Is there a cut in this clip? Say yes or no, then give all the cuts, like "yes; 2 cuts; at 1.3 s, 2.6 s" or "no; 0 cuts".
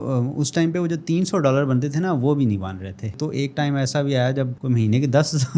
yes; 1 cut; at 3.1 s